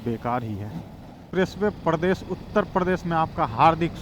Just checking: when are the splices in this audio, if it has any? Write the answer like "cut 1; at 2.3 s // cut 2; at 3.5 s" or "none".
cut 1; at 1.2 s